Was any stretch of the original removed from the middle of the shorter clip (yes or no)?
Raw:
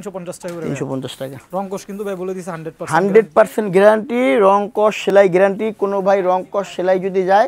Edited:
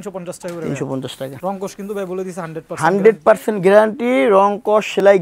yes